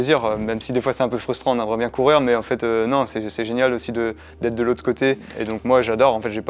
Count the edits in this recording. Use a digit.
1